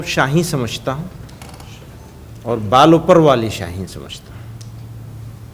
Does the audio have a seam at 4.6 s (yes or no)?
no